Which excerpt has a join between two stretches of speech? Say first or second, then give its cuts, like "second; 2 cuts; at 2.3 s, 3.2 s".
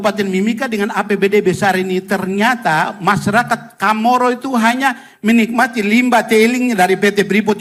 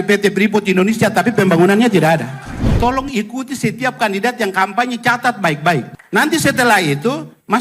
second; 2 cuts; at 2.8 s, 5.9 s